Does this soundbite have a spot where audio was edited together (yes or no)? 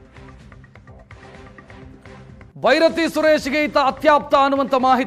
yes